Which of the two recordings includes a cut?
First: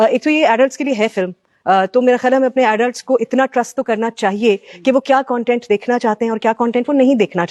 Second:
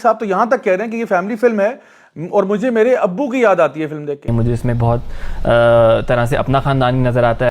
second; 1 cut; at 4.3 s

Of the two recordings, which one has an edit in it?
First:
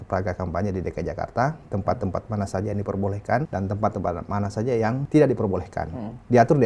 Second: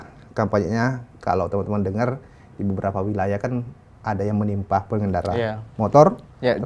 first; 2 cuts; at 3.5 s, 5.0 s

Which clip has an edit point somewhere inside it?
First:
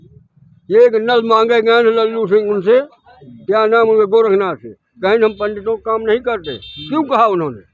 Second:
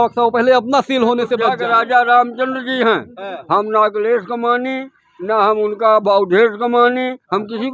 second; 1 cut; at 1.4 s

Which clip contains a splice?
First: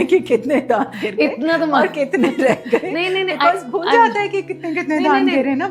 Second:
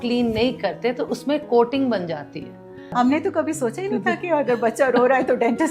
second; 1 cut; at 2.9 s

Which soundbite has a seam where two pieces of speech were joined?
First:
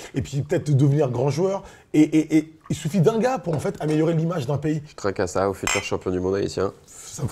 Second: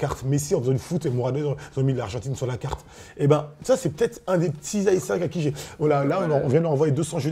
first; 1 cut; at 4.9 s

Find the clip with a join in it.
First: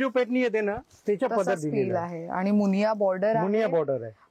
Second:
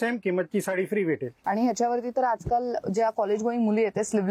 second; 1 cut; at 1.4 s

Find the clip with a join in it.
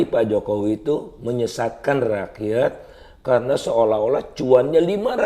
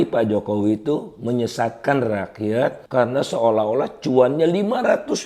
second; 1 cut; at 2.8 s

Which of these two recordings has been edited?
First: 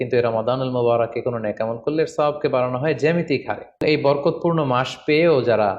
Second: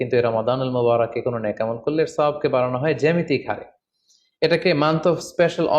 first; 1 cut; at 3.8 s

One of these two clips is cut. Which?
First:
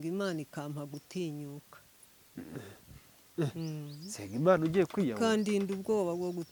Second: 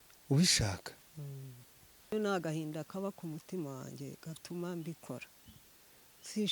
second; 1 cut; at 2.1 s

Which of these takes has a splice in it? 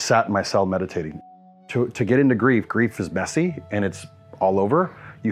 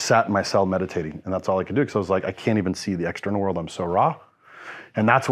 first; 1 cut; at 1.4 s

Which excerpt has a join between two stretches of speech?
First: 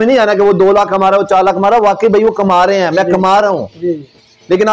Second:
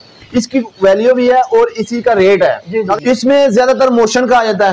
second; 1 cut; at 3.0 s

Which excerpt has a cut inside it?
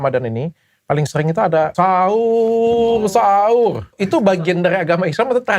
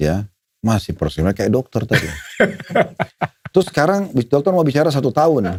first; 2 cuts; at 1.7 s, 4.0 s

